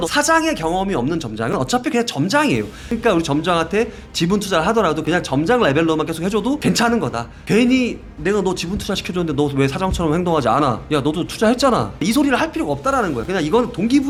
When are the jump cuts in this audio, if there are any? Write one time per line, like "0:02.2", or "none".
none